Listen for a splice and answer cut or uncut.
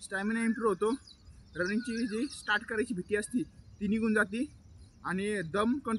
uncut